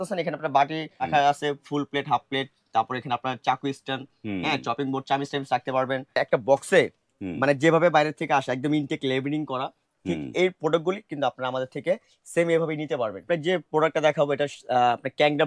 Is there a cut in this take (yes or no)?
yes